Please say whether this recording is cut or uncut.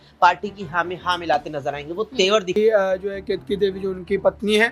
cut